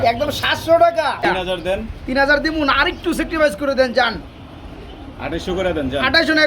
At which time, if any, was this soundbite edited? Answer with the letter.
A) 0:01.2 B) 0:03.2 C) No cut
A